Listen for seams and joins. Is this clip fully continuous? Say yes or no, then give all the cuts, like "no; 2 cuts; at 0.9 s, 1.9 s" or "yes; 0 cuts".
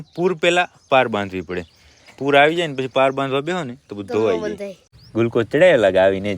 no; 1 cut; at 4.7 s